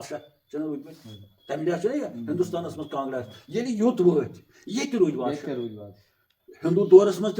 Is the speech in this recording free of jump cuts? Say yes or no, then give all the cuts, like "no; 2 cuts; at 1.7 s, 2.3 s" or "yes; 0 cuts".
yes; 0 cuts